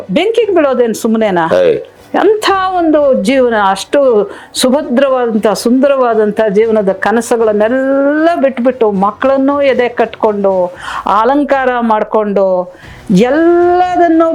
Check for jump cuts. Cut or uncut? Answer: uncut